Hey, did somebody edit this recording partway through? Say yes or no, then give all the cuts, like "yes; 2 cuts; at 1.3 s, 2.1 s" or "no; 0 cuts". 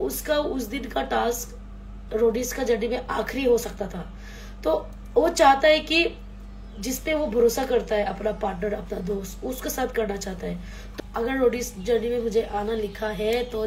yes; 1 cut; at 10.9 s